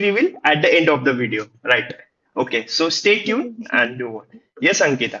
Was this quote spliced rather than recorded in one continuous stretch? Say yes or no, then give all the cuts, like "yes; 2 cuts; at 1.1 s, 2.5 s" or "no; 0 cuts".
no; 0 cuts